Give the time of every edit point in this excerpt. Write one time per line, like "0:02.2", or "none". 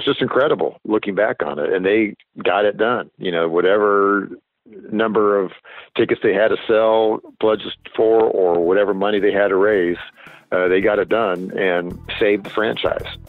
none